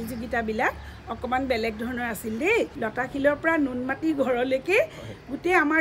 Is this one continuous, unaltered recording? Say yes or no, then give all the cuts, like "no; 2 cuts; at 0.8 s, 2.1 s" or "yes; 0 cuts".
no; 1 cut; at 2.8 s